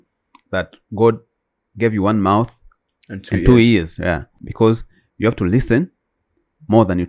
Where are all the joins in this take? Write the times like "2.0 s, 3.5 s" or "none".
4.4 s